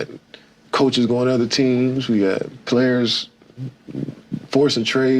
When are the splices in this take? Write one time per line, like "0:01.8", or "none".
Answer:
0:01.8